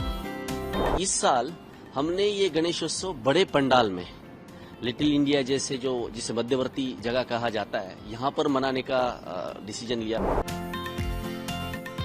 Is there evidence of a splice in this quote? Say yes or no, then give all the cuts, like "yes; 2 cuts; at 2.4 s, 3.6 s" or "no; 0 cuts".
yes; 2 cuts; at 0.9 s, 10.2 s